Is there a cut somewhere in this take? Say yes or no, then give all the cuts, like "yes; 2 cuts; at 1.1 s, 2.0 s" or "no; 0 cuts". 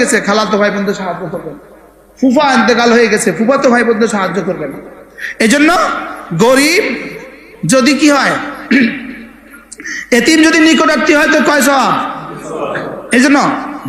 no; 0 cuts